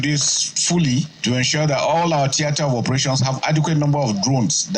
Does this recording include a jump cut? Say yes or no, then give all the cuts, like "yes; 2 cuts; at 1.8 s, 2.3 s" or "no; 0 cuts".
yes; 1 cut; at 1.1 s